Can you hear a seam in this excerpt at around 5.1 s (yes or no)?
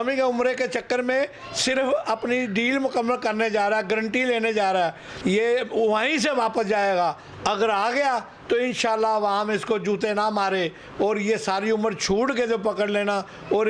yes